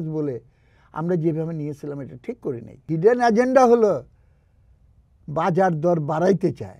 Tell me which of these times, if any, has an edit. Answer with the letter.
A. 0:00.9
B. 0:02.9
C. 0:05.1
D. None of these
B